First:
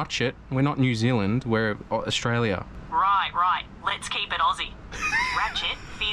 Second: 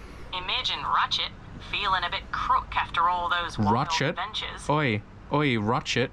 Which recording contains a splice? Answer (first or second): first